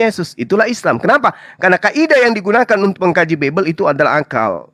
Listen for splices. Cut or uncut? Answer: uncut